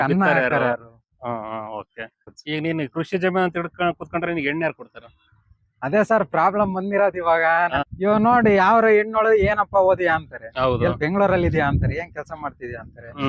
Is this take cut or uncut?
uncut